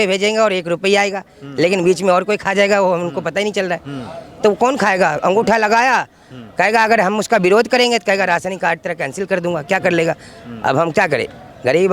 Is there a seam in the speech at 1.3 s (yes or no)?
no